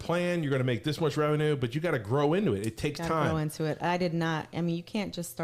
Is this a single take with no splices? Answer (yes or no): yes